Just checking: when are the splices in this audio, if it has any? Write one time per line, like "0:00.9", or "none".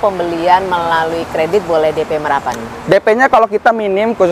none